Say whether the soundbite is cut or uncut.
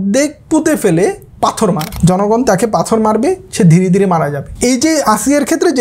cut